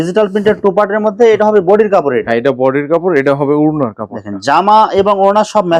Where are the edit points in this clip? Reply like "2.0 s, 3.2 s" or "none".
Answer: none